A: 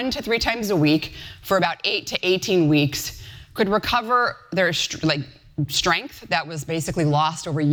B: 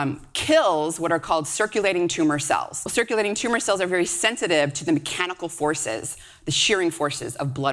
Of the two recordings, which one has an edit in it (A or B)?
B